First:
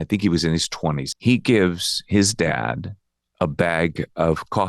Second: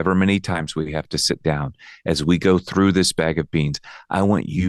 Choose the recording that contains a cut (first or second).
first